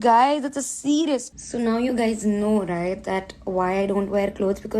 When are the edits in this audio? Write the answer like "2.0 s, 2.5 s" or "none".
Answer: 1.3 s